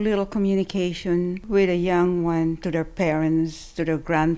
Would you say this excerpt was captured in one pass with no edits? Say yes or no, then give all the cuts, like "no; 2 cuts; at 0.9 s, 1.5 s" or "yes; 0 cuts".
no; 1 cut; at 1.4 s